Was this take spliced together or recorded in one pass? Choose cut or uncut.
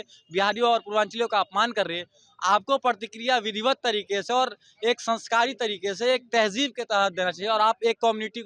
uncut